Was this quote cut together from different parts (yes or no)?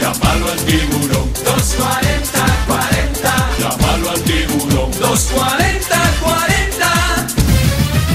no